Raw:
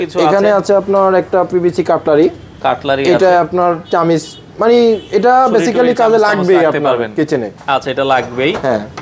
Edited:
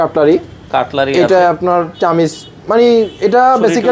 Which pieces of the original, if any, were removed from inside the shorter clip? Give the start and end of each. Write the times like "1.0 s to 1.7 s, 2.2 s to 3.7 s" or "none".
none